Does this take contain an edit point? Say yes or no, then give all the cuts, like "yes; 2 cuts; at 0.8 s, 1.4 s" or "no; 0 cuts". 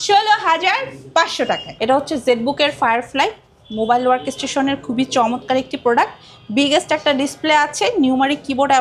yes; 1 cut; at 1.7 s